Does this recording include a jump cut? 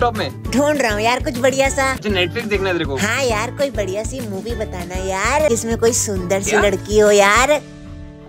yes; 2 cuts; at 2.0 s, 5.5 s

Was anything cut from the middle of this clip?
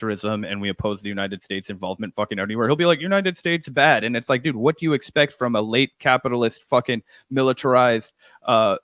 no; 0 cuts

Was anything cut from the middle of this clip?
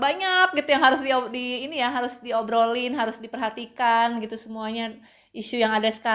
no; 0 cuts

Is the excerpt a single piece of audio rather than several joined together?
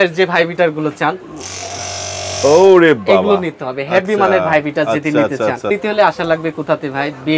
no; 1 cut; at 5.7 s

